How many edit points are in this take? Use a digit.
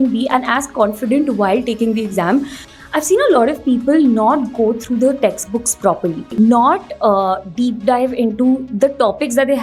2